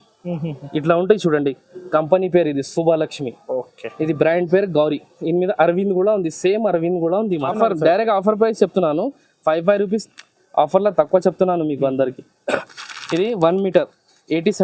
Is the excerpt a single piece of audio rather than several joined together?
no; 1 cut; at 7.5 s

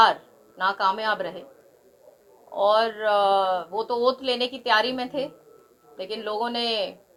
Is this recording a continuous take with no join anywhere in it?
yes; 0 cuts

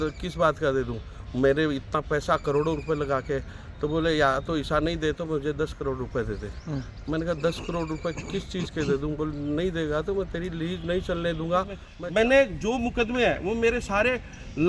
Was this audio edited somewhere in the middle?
yes; 1 cut; at 11.8 s

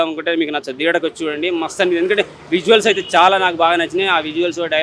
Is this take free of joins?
yes; 0 cuts

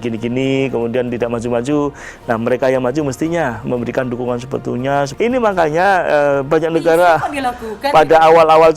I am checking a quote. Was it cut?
yes; 1 cut; at 5.1 s

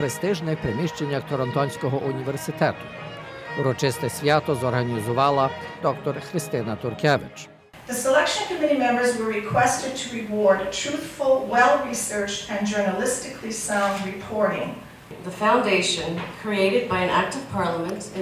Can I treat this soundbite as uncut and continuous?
yes; 0 cuts

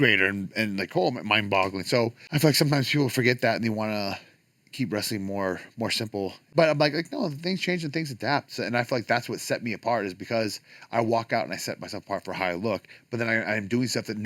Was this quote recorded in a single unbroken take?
no; 2 cuts; at 2.2 s, 6.5 s

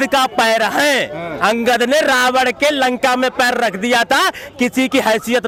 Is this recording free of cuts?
yes; 0 cuts

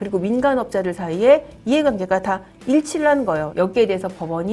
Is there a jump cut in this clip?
yes; 1 cut; at 3.5 s

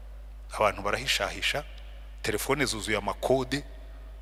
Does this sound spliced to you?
no; 0 cuts

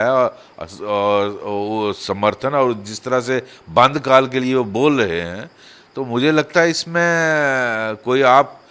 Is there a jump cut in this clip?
no; 0 cuts

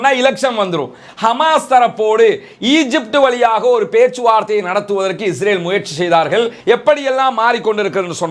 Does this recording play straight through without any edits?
no; 2 cuts; at 1.0 s, 6.6 s

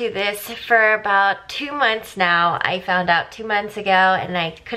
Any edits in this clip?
no; 0 cuts

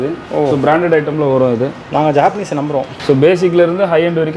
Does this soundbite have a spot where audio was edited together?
yes; 1 cut; at 2.9 s

